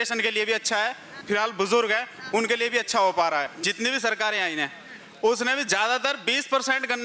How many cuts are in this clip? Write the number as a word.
two